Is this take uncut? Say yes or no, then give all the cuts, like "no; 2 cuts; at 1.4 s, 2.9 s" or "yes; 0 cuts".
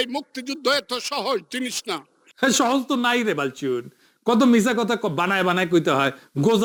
yes; 0 cuts